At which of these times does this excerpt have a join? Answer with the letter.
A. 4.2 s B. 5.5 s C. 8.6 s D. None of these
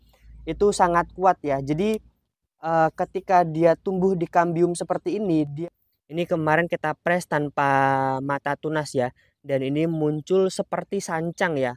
B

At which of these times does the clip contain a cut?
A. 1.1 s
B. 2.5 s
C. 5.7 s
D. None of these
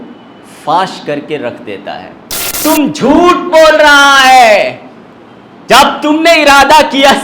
B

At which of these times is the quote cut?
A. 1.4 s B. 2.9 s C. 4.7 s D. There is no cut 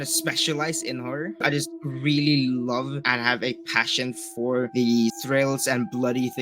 A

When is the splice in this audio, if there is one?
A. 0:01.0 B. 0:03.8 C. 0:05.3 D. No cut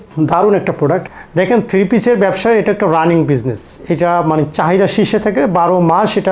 A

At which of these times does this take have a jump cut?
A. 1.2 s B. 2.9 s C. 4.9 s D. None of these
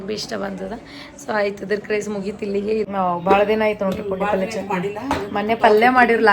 B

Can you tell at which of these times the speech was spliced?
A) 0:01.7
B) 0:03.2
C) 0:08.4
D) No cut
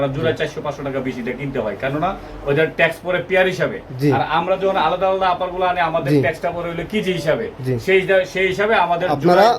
D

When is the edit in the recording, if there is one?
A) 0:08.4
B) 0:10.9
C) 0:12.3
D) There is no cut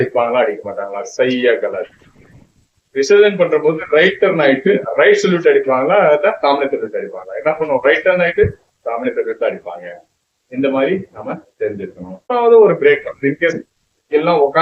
C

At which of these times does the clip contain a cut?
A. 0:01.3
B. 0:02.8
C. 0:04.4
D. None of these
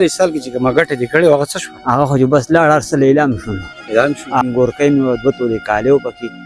C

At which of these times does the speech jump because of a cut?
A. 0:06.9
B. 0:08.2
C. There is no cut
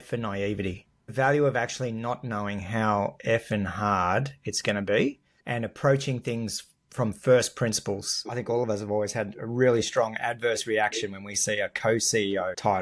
B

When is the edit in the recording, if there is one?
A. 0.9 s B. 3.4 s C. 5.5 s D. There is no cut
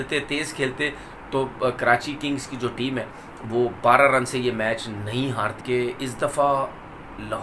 C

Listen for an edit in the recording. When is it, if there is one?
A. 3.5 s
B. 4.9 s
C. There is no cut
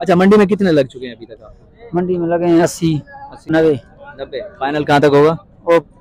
A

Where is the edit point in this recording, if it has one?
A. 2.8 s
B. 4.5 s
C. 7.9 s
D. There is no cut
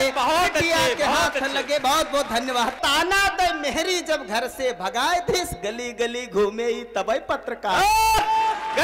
A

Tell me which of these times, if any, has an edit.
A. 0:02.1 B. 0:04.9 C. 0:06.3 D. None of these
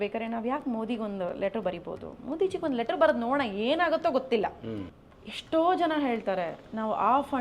B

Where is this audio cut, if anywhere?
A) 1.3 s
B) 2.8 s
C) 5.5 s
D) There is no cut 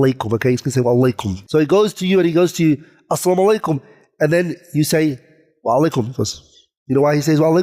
A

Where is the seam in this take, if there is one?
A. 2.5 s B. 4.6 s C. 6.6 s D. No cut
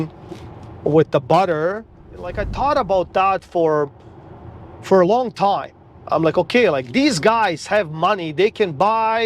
A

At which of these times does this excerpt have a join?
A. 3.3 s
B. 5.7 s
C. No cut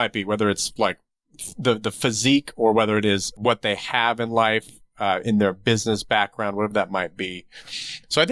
A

